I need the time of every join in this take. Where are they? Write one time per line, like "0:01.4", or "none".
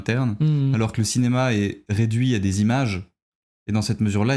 none